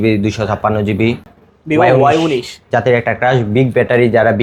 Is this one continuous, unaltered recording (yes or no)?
no